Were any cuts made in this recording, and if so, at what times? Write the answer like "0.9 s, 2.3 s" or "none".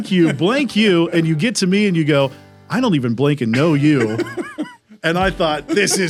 none